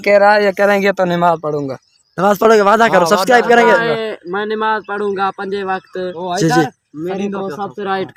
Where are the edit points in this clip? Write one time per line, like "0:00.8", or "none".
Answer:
none